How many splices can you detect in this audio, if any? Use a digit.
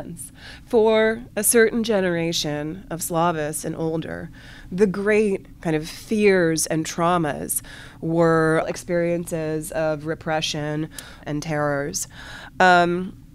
2